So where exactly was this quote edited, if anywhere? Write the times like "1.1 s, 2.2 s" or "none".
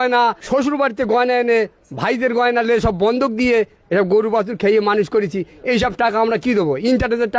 none